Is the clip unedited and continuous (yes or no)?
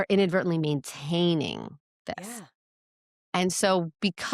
yes